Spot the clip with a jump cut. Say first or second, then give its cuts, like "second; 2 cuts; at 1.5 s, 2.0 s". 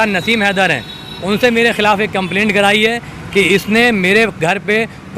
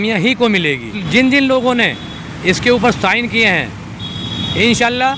second; 1 cut; at 1.0 s